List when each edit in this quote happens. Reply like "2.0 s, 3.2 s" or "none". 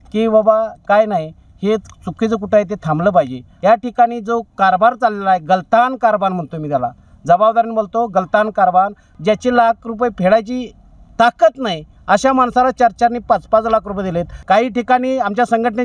3.5 s, 9.1 s, 14.3 s

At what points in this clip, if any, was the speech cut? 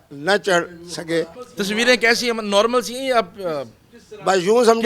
1.4 s

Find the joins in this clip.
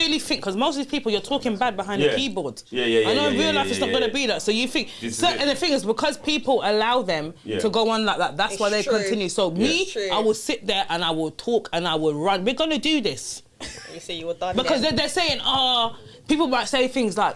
none

